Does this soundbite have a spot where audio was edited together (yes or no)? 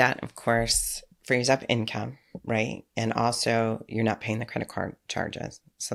no